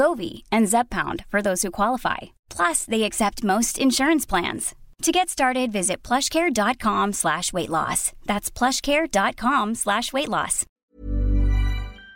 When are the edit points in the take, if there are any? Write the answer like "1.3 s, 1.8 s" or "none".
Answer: 10.6 s